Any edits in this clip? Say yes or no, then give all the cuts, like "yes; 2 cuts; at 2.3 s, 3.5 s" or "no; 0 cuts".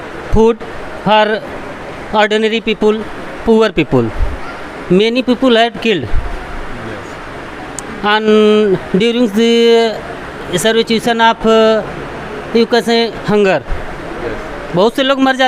no; 0 cuts